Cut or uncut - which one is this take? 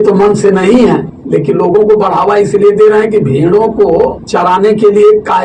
cut